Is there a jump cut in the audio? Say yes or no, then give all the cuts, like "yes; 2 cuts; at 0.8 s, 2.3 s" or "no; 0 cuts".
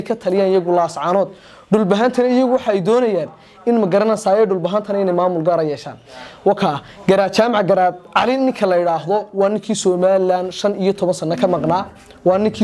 no; 0 cuts